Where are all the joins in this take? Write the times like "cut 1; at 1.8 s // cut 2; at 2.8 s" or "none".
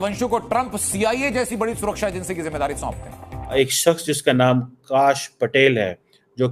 cut 1; at 3.5 s